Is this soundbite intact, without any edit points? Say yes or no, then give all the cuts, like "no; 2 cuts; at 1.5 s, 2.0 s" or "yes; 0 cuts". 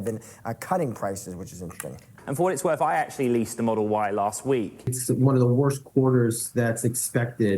no; 2 cuts; at 2.1 s, 4.9 s